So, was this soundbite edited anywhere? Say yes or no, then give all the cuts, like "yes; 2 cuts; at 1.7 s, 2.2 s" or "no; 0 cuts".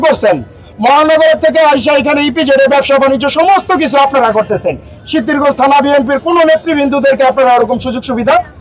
no; 0 cuts